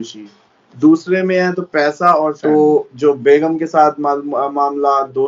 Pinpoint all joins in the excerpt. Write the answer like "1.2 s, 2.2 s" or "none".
2.4 s